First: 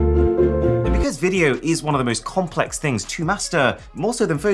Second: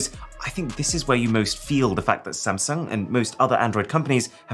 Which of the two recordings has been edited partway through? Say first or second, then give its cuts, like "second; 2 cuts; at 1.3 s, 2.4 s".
first; 1 cut; at 1.0 s